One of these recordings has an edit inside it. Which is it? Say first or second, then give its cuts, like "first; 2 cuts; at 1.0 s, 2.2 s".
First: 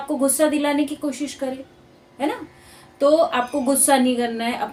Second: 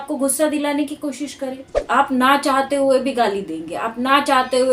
second; 1 cut; at 1.7 s